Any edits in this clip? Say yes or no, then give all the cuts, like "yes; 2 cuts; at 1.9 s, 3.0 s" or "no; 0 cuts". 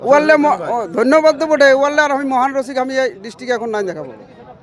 no; 0 cuts